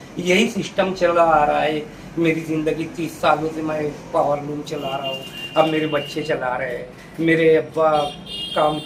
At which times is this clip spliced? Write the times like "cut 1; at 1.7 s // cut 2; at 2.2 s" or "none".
none